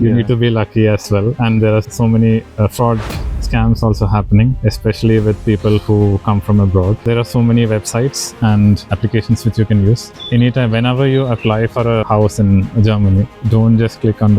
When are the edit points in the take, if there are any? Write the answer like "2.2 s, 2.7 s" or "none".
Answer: 1.9 s, 4.6 s, 7.0 s, 8.9 s, 10.1 s, 12.0 s